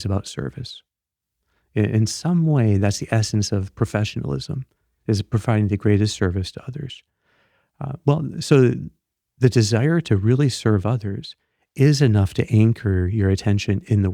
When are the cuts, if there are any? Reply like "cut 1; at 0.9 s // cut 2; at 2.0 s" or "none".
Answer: none

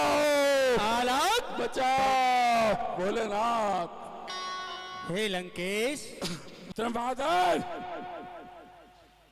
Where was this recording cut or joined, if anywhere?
cut 1; at 6.5 s

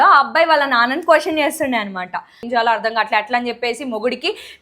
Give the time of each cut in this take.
cut 1; at 2.5 s

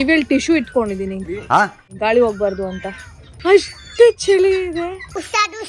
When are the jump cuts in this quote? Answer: cut 1; at 1.1 s // cut 2; at 1.8 s // cut 3; at 3.3 s

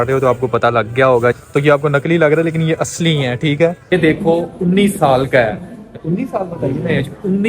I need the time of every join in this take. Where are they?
cut 1; at 1.4 s // cut 2; at 3.9 s

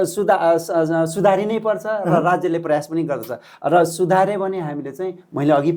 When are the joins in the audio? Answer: none

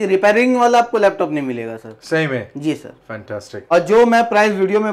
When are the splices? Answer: cut 1; at 3.5 s

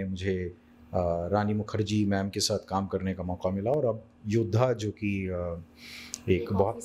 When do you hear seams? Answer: none

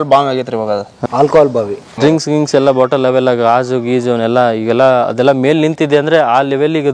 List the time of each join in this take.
cut 1; at 0.9 s // cut 2; at 1.9 s

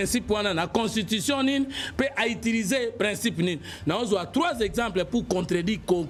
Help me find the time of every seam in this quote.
none

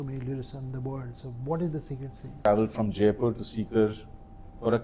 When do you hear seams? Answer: cut 1; at 2.5 s

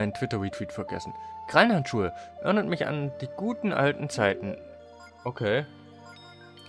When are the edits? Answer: none

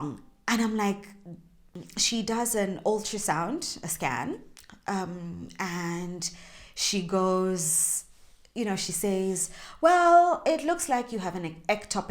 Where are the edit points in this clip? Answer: cut 1; at 1.9 s

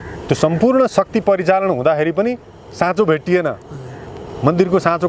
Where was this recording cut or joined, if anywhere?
none

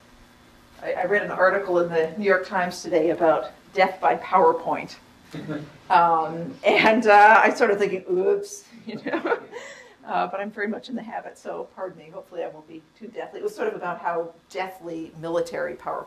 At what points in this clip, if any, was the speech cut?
cut 1; at 11.5 s

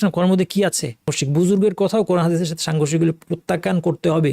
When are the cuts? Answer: cut 1; at 1.2 s

